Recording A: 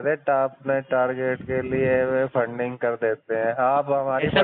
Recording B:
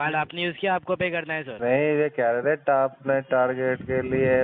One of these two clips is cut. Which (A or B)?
B